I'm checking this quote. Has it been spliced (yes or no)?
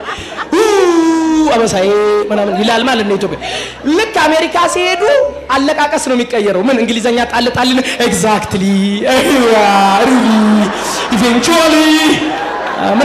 no